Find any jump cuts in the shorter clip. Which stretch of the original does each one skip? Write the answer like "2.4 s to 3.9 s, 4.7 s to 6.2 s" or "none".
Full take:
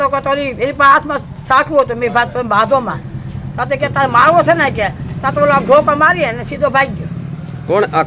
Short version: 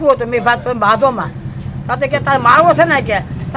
none